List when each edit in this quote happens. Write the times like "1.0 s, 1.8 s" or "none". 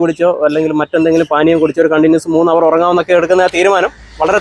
none